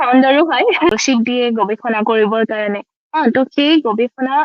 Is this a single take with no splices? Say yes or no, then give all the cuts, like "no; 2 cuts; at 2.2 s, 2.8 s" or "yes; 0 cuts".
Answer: no; 1 cut; at 0.9 s